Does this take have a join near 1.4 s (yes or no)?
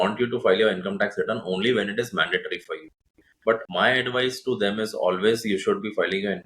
no